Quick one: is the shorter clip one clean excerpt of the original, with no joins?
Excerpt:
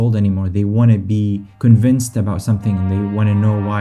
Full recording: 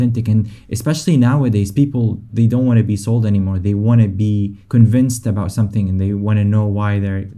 yes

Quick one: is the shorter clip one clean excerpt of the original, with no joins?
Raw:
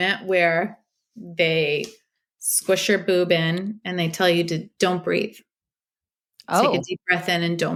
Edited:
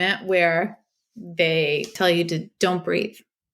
no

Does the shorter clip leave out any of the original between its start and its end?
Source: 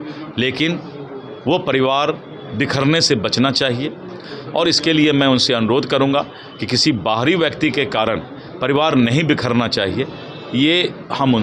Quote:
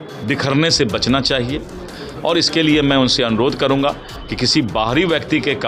no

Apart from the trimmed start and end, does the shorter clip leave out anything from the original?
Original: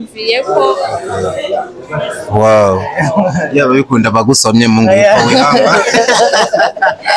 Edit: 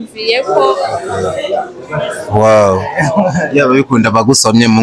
no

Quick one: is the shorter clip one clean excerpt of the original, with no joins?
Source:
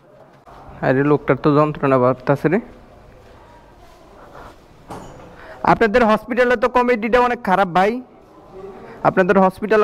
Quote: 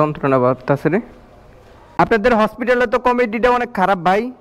no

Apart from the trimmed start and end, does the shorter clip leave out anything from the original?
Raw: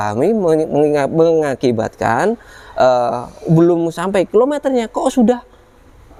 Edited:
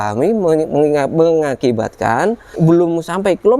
yes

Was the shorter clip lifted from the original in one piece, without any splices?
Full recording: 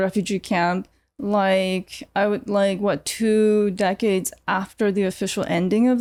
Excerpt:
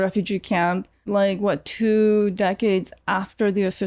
no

